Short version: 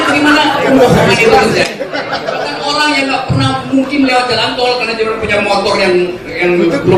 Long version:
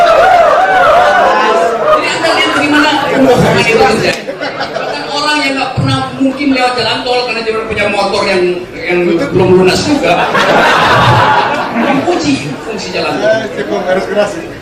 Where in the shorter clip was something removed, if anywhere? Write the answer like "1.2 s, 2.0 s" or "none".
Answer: none